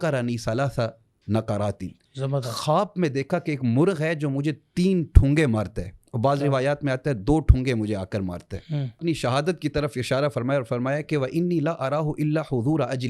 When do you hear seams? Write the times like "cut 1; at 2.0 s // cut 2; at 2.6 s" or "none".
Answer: cut 1; at 2.0 s // cut 2; at 9.0 s